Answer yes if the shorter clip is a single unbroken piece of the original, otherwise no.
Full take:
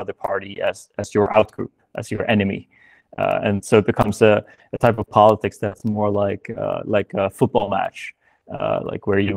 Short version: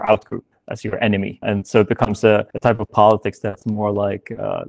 no